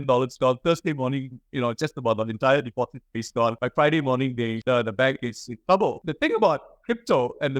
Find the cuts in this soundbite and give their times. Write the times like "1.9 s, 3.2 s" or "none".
3.6 s, 4.6 s, 6.0 s